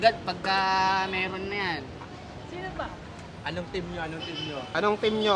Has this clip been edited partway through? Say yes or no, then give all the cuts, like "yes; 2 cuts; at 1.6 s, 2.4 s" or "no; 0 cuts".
no; 0 cuts